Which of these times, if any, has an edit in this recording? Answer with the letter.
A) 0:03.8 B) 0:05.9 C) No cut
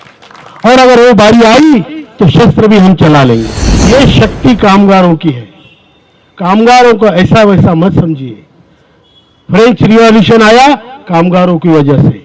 A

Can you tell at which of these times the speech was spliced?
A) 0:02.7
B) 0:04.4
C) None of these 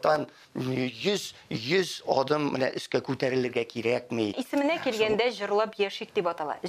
B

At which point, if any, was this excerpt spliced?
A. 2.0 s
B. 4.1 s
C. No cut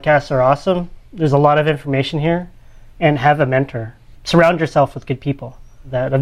B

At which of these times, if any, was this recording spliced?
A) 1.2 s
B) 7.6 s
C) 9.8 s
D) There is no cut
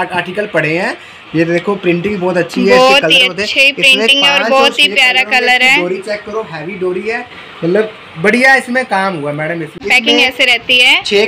C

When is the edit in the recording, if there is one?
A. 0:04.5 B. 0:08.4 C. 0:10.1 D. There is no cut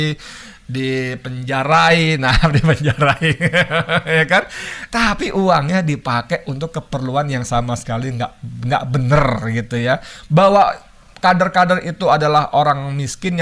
D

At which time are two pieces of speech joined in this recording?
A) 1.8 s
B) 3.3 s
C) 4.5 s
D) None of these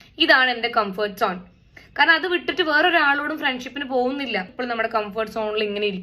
C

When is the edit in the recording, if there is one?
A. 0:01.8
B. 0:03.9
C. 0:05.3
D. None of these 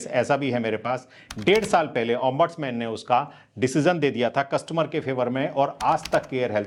D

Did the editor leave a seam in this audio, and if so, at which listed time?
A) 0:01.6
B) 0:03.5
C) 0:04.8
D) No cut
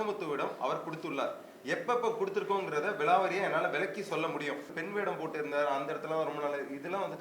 C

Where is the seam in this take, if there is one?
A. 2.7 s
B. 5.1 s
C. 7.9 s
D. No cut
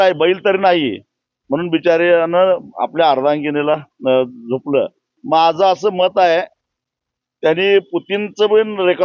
B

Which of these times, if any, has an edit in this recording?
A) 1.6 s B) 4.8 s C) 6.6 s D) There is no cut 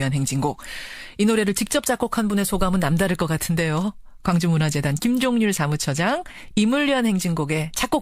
A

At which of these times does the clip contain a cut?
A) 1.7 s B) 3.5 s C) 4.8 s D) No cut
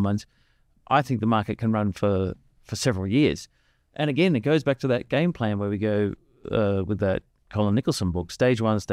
D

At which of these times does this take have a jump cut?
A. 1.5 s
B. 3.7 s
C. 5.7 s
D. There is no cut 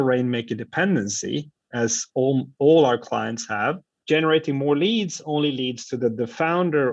D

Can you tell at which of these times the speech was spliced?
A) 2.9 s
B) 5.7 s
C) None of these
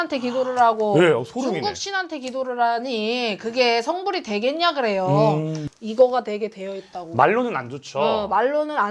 B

